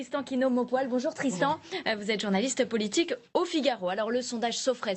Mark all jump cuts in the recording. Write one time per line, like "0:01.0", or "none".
none